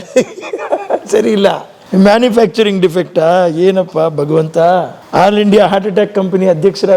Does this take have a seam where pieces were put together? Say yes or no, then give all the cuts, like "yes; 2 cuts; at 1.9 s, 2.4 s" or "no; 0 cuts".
yes; 2 cuts; at 1.7 s, 5.0 s